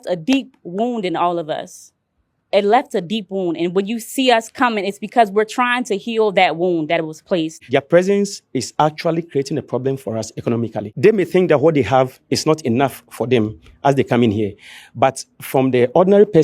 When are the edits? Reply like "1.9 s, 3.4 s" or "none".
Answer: 7.6 s, 10.8 s